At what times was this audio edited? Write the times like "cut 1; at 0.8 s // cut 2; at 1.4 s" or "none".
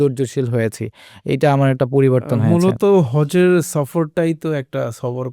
none